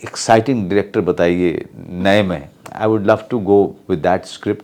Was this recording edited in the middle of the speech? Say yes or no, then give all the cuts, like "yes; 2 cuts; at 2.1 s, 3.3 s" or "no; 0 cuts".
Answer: no; 0 cuts